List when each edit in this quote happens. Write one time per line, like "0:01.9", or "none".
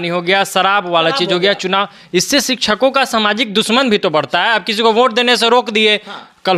none